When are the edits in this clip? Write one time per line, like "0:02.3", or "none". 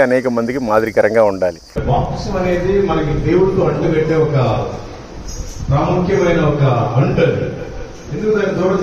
0:01.8